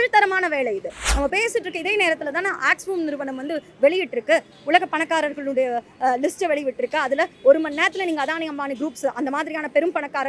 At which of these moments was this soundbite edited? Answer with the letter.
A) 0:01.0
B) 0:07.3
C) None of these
A